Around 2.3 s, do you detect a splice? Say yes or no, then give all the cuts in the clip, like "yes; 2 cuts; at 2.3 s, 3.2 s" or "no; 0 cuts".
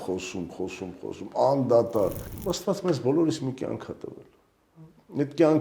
yes; 1 cut; at 2.3 s